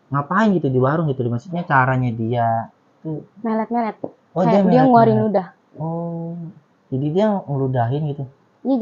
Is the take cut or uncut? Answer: uncut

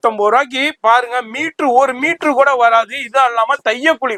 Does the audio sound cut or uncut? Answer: uncut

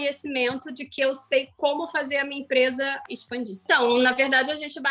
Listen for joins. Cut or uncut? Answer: cut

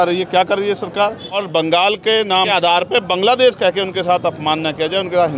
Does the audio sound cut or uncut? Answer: cut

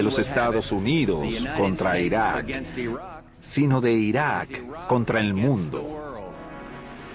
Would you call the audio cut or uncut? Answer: cut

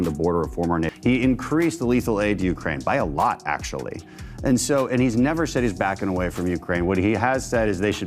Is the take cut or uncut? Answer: cut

